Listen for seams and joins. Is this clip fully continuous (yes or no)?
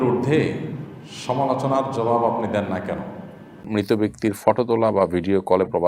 no